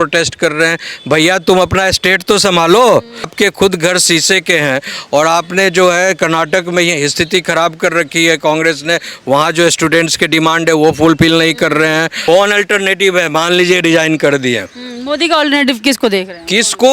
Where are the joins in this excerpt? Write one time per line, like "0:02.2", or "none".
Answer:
0:03.3
0:12.2